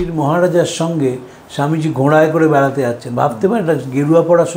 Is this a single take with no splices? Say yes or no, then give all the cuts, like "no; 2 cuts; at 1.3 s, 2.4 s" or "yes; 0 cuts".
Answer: yes; 0 cuts